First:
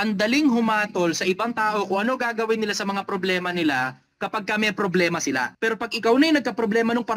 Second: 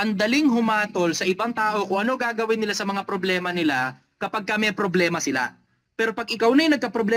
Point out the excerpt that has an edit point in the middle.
first; 1 cut; at 5.5 s

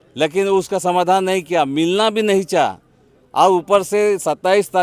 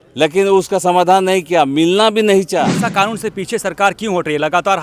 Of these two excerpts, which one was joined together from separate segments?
second; 1 cut; at 2.8 s

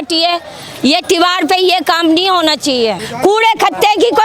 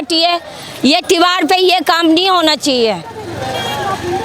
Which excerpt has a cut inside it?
first; 1 cut; at 3.1 s

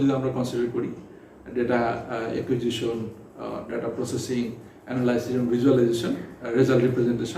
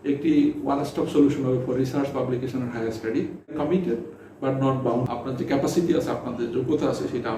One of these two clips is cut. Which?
second; 2 cuts; at 3.6 s, 5.1 s

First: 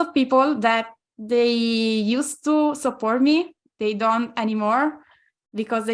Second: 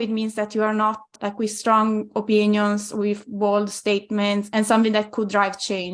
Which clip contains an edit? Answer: second; 2 cuts; at 1.1 s, 4.5 s

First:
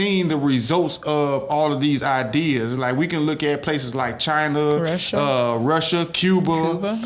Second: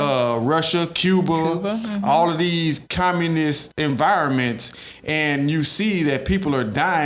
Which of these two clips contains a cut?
second; 1 cut; at 3.7 s

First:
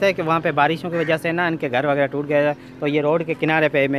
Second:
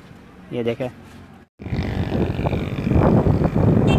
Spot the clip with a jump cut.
second; 1 cut; at 1.5 s

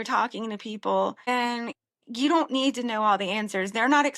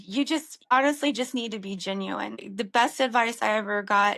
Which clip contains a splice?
second; 1 cut; at 2.4 s

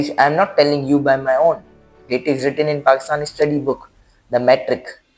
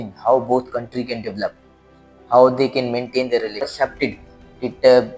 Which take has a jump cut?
second; 1 cut; at 3.8 s

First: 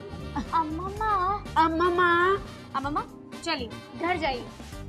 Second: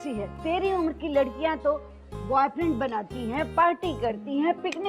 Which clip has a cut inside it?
second; 1 cut; at 3.4 s

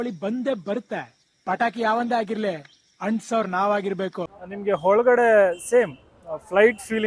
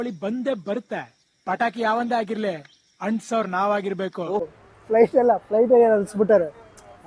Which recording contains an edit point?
first; 1 cut; at 4.2 s

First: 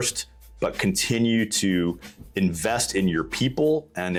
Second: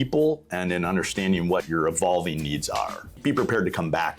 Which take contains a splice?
second; 2 cuts; at 1.6 s, 3.2 s

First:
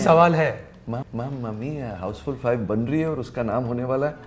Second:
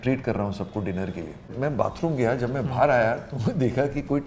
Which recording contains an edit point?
second; 1 cut; at 1.5 s

